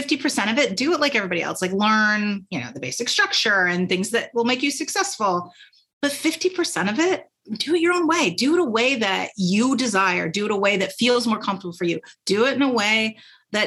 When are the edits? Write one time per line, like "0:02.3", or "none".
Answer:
none

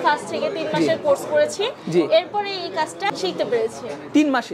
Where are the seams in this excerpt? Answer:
0:03.1

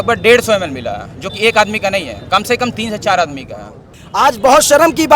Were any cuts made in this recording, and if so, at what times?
0:04.0

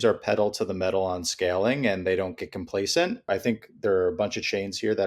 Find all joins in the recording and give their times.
0:03.2

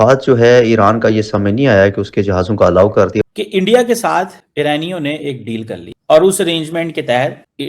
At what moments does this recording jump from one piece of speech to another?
0:03.2

